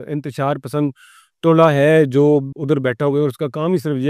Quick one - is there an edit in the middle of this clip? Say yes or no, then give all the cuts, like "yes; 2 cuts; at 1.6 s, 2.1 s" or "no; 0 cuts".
yes; 1 cut; at 2.5 s